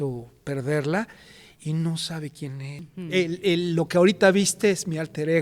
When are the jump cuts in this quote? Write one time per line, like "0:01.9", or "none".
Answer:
0:02.7